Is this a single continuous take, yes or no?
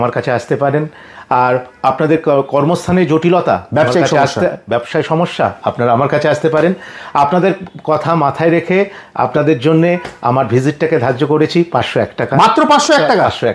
yes